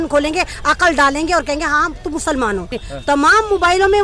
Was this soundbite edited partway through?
yes; 1 cut; at 2.8 s

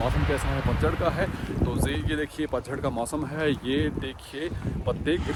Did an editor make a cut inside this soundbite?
no; 0 cuts

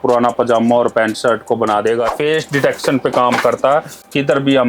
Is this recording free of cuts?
no; 1 cut; at 2.1 s

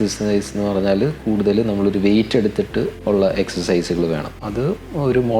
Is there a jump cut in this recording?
yes; 2 cuts; at 3.0 s, 4.4 s

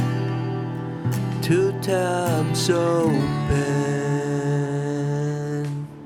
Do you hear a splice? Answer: no; 0 cuts

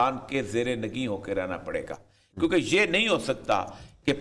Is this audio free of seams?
yes; 0 cuts

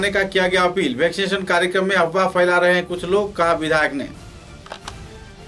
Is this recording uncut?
yes; 0 cuts

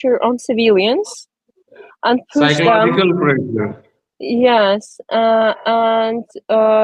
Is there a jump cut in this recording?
no; 0 cuts

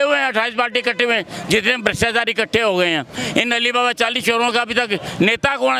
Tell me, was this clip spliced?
no; 0 cuts

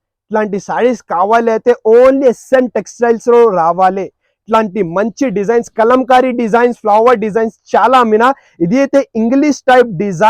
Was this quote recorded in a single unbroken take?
yes; 0 cuts

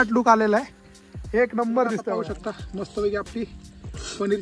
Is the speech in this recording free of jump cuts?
no; 1 cut; at 2.1 s

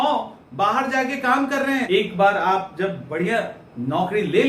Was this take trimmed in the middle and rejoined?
yes; 1 cut; at 1.9 s

